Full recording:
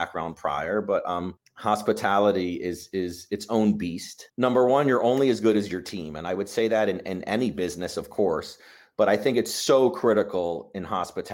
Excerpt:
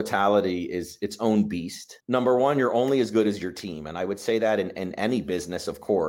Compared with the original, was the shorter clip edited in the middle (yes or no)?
yes